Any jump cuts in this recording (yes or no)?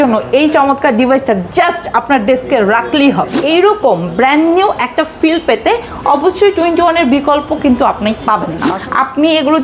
yes